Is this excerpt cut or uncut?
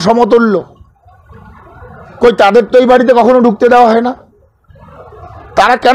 uncut